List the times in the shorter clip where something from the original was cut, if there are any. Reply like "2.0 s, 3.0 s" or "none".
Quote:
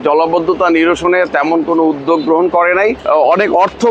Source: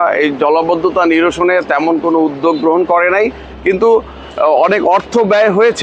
3.0 s

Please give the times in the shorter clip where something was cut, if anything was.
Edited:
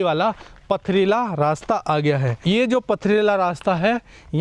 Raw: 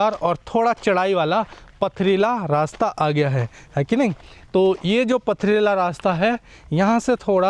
2.4 s

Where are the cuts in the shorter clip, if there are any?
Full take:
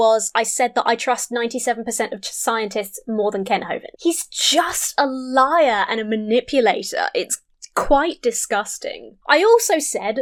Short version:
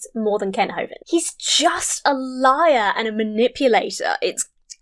none

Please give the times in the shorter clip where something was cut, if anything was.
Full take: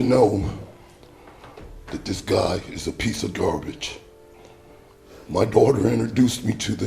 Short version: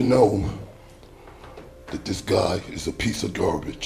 none

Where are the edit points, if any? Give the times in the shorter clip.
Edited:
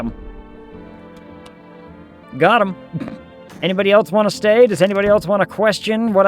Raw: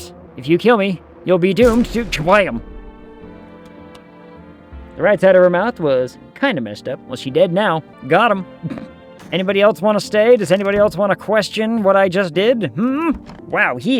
2.2 s

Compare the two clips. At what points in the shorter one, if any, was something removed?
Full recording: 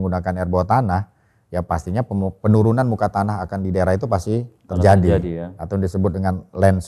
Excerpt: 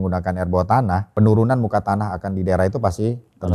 1.1 s

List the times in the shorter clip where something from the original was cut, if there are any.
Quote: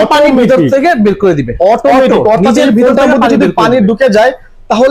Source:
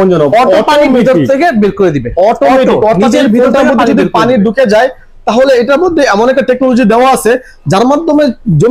none

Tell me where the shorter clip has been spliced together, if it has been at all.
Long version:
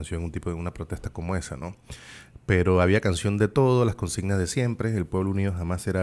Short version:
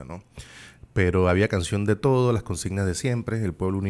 none

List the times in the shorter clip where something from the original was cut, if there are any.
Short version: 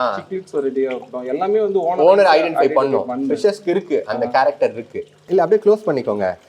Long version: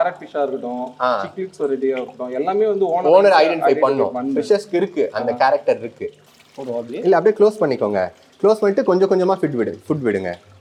5.2 s

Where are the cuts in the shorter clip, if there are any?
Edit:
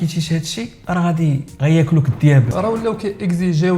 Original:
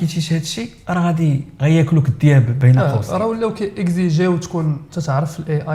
2.5 s

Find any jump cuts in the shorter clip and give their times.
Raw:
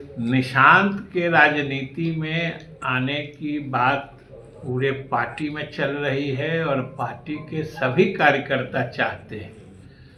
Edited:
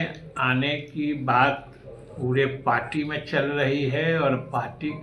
none

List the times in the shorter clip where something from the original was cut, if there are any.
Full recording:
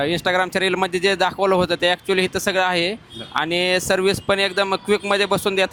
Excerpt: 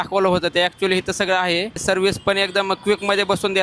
1.8 s

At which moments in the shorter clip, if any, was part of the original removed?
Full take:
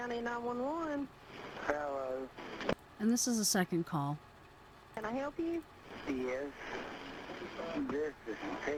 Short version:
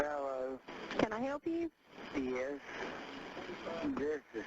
1.1 s

